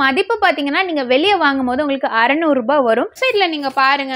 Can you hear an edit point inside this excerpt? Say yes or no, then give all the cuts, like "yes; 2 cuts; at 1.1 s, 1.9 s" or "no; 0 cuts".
yes; 1 cut; at 3.2 s